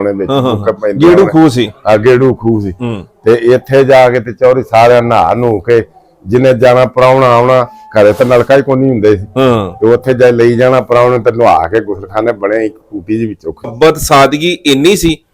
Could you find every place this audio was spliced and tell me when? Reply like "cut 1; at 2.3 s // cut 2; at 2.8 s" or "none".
cut 1; at 13.7 s